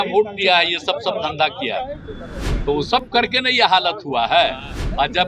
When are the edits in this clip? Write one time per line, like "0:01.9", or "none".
none